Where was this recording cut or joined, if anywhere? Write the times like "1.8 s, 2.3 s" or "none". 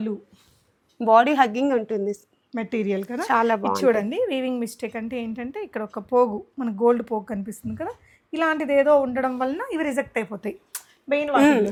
none